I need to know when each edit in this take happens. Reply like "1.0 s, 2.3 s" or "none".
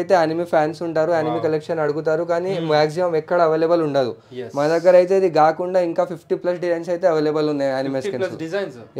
none